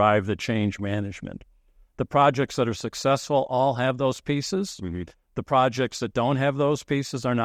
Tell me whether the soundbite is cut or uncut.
uncut